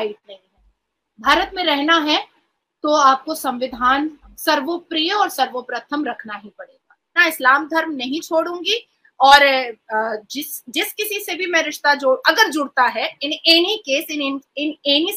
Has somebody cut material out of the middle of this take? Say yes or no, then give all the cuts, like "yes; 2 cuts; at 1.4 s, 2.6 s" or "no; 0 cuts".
yes; 1 cut; at 7.2 s